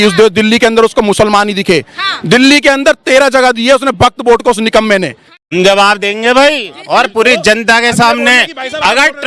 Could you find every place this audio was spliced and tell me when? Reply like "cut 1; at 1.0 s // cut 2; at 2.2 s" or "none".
cut 1; at 5.3 s